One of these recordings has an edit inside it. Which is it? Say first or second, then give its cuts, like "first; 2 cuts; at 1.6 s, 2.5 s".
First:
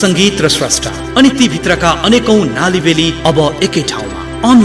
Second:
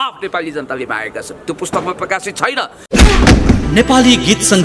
second; 1 cut; at 2.8 s